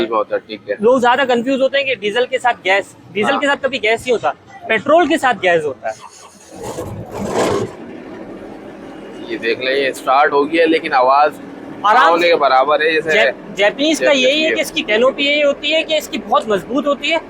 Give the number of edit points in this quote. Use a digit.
2